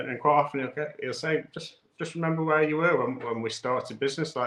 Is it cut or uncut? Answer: uncut